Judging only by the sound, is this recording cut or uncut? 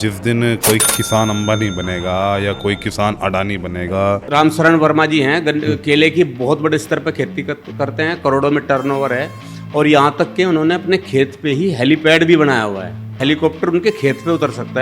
cut